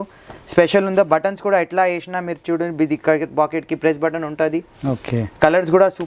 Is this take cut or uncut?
uncut